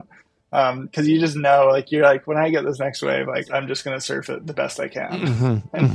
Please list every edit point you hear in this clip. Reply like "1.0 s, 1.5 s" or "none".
3.5 s

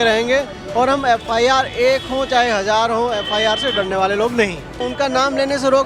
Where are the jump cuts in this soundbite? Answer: 4.8 s

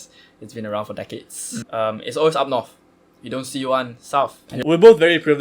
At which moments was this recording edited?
1.6 s, 4.5 s

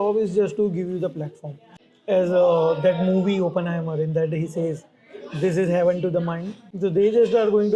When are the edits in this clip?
none

